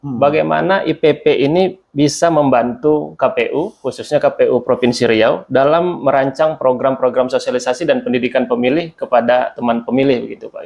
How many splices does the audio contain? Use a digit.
0